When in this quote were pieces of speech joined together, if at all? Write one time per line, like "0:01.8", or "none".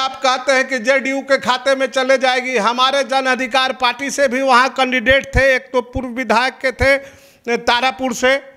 none